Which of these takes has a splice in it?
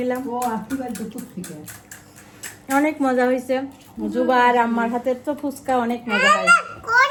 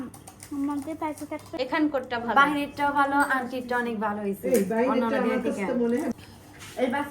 second; 2 cuts; at 1.4 s, 6.1 s

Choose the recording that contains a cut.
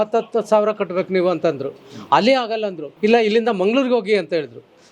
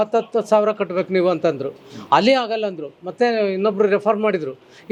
first; 1 cut; at 2.8 s

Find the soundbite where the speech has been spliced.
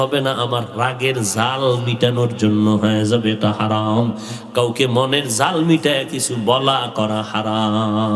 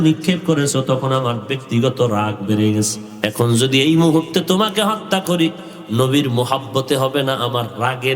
second; 1 cut; at 3.0 s

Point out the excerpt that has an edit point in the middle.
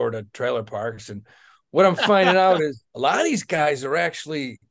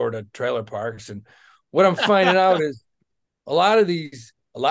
first; 1 cut; at 2.8 s

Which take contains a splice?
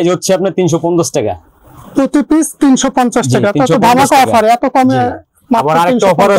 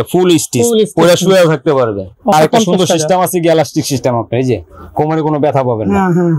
second; 1 cut; at 2.3 s

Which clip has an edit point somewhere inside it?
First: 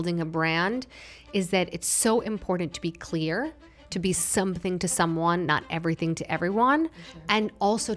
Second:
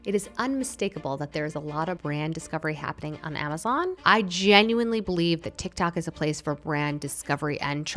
second; 2 cuts; at 2.0 s, 4.0 s

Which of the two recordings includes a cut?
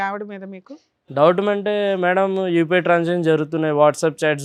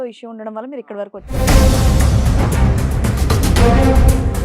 second; 1 cut; at 1.3 s

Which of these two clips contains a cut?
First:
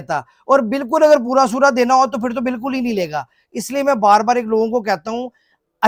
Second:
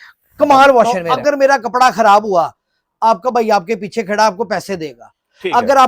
second; 1 cut; at 1.0 s

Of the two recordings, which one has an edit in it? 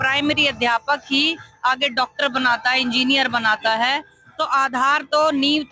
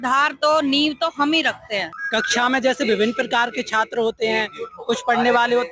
second; 1 cut; at 2.0 s

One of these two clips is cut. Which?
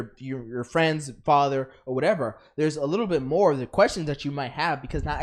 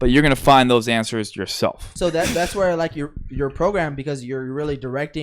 second; 1 cut; at 1.9 s

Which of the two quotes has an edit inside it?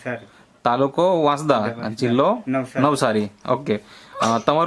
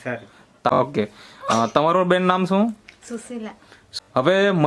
second; 2 cuts; at 0.7 s, 3.8 s

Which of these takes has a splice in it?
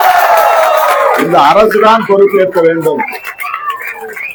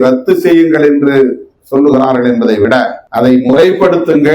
second; 1 cut; at 3.0 s

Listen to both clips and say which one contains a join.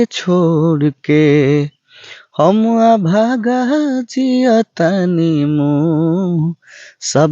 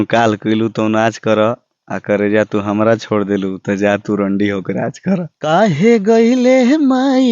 second; 1 cut; at 5.3 s

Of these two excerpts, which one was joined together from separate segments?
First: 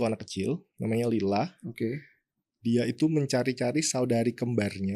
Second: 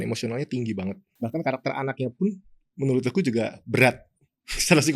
second; 1 cut; at 1.1 s

